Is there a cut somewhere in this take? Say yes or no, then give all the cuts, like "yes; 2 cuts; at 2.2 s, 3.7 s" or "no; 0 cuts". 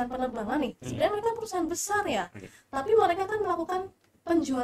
no; 0 cuts